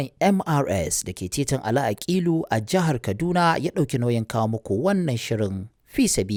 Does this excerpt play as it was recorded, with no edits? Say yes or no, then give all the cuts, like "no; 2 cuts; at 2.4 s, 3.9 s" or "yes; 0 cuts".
yes; 0 cuts